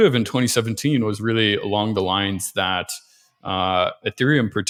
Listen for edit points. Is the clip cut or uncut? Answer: uncut